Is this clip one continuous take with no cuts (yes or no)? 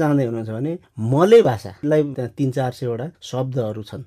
no